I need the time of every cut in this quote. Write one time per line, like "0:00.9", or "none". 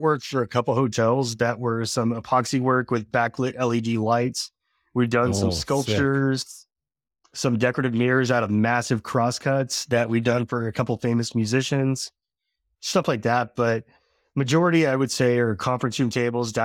none